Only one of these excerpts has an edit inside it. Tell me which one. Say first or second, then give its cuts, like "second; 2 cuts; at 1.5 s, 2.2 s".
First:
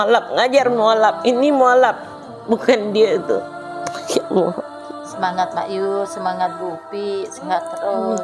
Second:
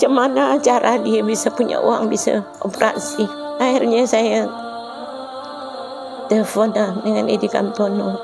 second; 1 cut; at 3.4 s